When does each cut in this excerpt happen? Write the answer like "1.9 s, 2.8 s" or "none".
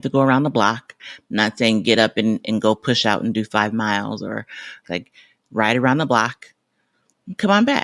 1.0 s, 4.9 s